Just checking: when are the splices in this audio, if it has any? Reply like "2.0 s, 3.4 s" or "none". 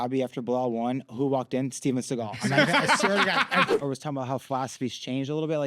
3.7 s